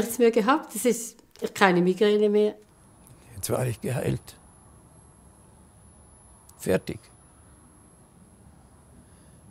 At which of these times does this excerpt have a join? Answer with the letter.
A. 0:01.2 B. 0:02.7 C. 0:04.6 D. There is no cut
B